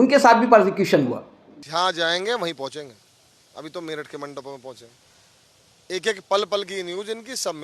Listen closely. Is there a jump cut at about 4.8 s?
no; 1 cut; at 1.6 s

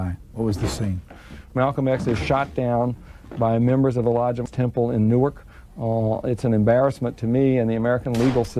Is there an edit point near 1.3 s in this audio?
yes; 2 cuts; at 1.3 s, 4.5 s

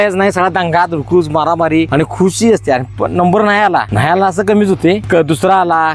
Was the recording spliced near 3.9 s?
yes; 3 cuts; at 1.9 s, 3.9 s, 5.0 s

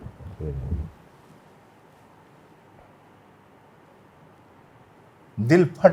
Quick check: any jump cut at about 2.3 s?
no; 1 cut; at 4.4 s

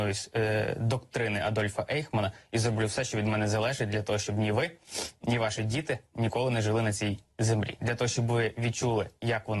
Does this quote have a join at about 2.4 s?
yes; 1 cut; at 2.4 s

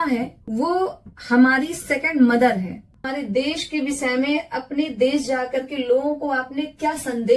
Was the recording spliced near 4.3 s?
no; 1 cut; at 3.0 s

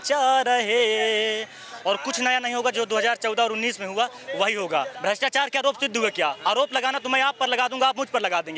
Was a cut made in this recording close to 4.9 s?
yes; 1 cut; at 4.9 s

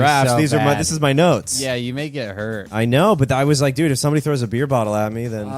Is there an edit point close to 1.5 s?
yes; 2 cuts; at 1.5 s, 2.7 s

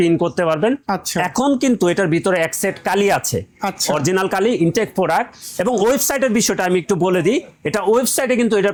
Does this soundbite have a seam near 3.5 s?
no; 0 cuts

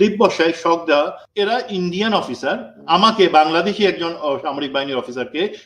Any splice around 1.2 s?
yes; 1 cut; at 1.2 s

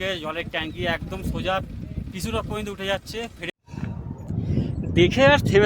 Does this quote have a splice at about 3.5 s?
yes; 1 cut; at 3.5 s

